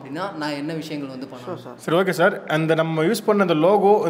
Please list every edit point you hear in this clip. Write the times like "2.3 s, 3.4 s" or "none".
1.7 s